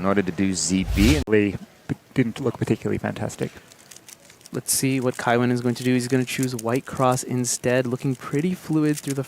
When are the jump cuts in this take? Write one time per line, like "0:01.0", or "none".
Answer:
0:01.3